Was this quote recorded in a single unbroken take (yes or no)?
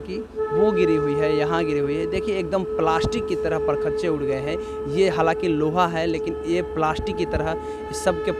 yes